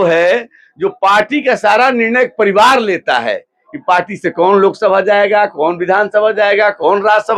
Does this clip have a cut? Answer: no; 0 cuts

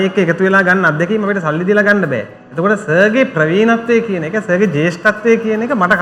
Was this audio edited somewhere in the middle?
no; 0 cuts

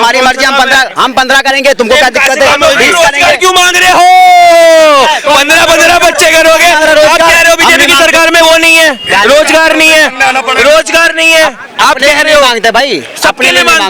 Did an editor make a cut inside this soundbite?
no; 0 cuts

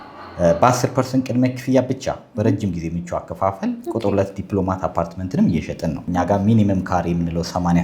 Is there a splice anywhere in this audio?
yes; 1 cut; at 6.0 s

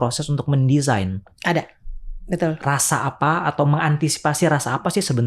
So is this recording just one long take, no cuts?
yes; 0 cuts

